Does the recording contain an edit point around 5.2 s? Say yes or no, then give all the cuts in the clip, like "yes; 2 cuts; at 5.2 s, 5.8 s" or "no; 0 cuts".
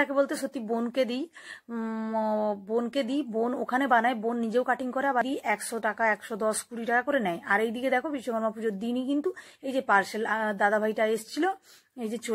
yes; 1 cut; at 5.2 s